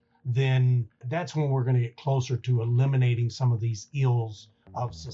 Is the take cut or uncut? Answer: uncut